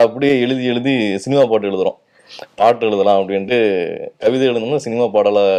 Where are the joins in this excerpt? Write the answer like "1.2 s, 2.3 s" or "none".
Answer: none